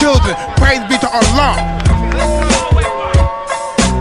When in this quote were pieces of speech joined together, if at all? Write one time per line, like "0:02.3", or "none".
none